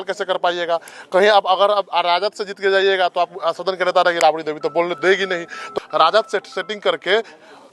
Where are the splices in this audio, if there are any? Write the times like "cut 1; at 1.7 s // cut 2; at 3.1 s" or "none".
cut 1; at 5.7 s